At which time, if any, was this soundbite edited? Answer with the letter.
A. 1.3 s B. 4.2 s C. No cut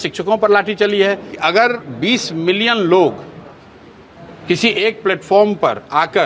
A